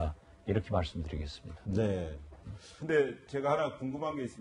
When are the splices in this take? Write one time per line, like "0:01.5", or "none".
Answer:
0:03.2